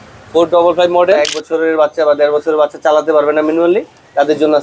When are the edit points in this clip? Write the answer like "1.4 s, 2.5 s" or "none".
1.2 s